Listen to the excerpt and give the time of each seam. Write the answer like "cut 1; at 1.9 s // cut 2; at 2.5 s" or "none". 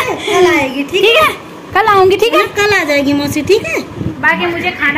cut 1; at 4.1 s